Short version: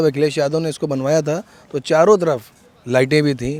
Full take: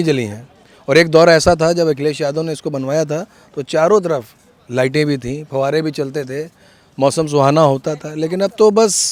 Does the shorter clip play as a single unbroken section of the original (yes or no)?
yes